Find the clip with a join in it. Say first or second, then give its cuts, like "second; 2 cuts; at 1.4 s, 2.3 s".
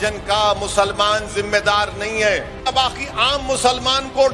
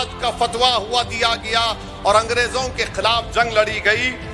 first; 1 cut; at 2.6 s